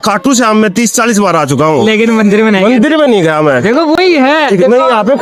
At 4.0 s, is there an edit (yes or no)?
no